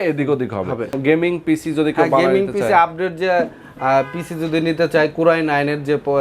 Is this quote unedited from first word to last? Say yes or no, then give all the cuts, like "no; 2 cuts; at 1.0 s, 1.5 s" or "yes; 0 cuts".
no; 1 cut; at 1.0 s